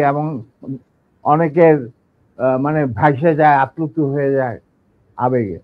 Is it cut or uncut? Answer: uncut